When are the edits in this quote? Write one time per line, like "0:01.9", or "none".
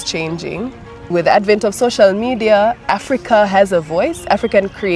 0:00.9